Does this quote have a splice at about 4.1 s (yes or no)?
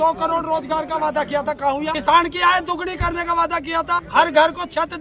yes